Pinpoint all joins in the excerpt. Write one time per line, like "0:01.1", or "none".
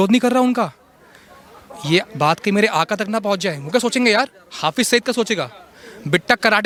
none